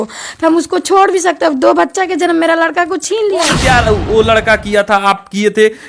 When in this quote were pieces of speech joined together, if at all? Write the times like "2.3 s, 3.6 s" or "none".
3.5 s